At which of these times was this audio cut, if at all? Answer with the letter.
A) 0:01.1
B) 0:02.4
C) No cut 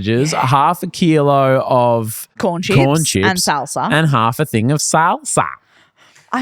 B